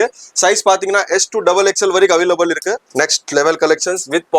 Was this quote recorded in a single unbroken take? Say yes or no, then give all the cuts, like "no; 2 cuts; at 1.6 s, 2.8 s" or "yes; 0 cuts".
no; 1 cut; at 2.8 s